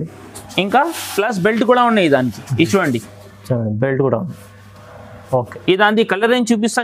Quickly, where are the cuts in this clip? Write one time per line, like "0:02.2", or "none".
none